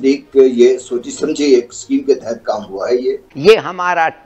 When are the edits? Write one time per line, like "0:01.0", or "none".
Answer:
0:03.3